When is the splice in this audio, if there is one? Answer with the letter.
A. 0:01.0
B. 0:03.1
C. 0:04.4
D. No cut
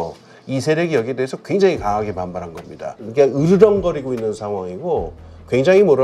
B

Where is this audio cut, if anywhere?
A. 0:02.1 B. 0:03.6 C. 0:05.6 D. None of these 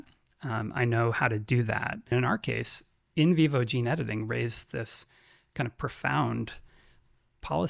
A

